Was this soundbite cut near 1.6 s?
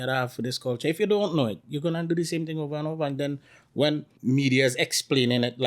no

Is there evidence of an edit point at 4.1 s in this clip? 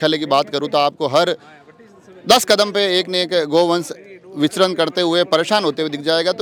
no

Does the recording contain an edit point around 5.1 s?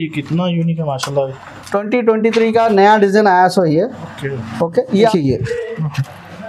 yes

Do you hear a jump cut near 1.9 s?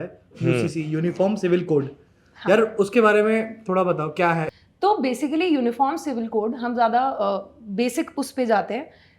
no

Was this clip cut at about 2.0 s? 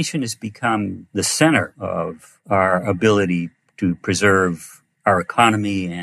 yes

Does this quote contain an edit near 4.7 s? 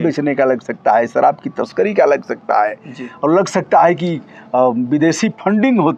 no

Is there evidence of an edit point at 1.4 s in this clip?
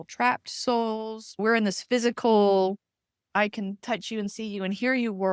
yes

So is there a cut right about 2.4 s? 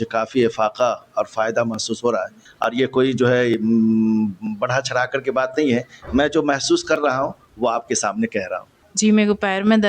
yes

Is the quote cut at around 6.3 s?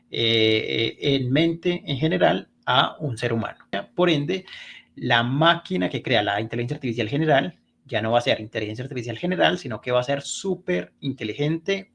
no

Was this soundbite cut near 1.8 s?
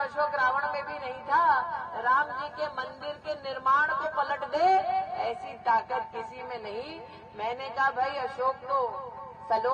no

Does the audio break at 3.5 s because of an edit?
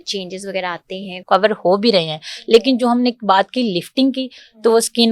no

